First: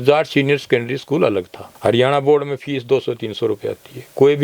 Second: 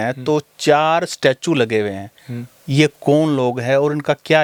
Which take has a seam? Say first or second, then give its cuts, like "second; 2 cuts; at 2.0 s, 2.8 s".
first; 1 cut; at 1.6 s